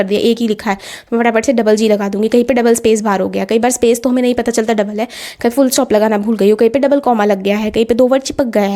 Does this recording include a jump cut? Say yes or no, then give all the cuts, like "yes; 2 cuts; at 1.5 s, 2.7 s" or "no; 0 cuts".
no; 0 cuts